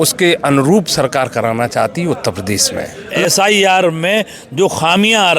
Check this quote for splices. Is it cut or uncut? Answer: cut